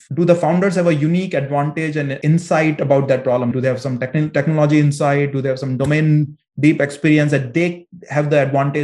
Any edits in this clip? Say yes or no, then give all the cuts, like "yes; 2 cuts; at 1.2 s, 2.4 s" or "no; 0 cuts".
yes; 1 cut; at 2.1 s